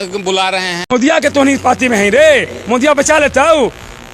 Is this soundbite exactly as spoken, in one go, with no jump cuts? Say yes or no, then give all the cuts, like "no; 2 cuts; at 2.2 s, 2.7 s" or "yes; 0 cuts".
no; 1 cut; at 0.9 s